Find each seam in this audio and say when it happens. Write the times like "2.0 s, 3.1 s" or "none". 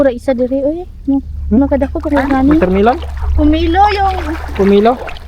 2.6 s